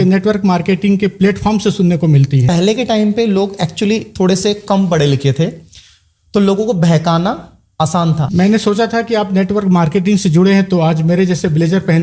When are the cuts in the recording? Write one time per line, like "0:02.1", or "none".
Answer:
0:02.5
0:08.2